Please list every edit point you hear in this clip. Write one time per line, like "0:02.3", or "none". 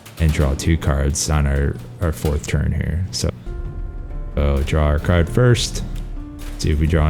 0:03.3